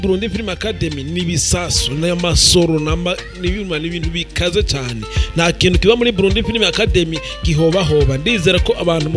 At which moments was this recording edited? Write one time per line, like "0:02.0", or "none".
none